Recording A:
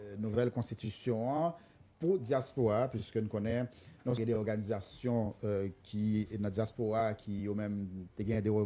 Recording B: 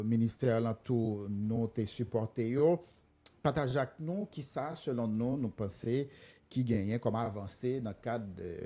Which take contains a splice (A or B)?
A